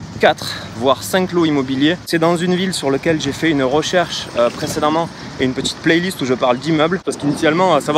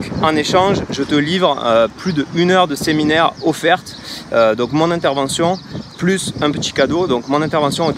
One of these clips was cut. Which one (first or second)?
first